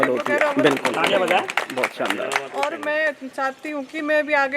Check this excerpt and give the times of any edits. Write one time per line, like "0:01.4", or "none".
none